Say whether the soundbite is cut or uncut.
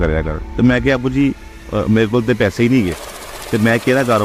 uncut